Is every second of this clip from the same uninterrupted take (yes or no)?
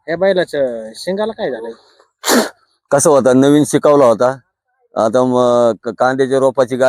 yes